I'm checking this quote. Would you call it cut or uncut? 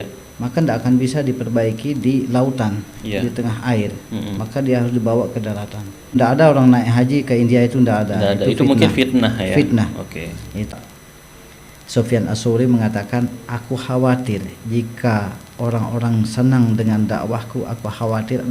cut